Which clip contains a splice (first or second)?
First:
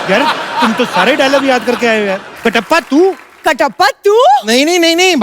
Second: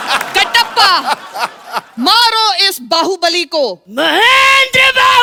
first